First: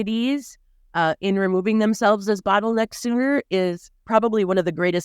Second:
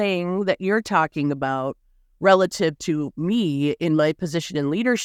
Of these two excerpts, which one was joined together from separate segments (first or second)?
first